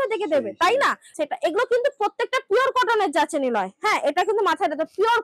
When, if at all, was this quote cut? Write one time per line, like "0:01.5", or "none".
0:01.0